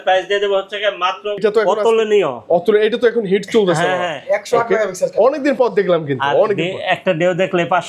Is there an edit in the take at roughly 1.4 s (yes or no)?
yes